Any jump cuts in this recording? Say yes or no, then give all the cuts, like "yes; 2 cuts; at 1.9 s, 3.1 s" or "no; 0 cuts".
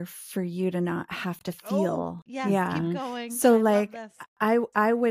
yes; 1 cut; at 2.2 s